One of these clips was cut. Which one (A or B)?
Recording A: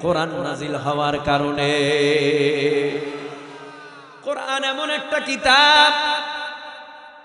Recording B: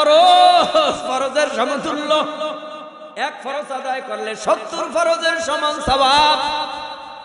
B